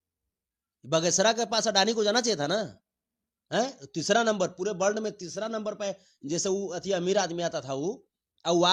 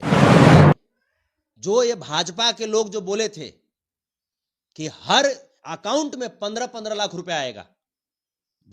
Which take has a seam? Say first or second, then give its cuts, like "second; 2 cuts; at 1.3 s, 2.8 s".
second; 1 cut; at 0.9 s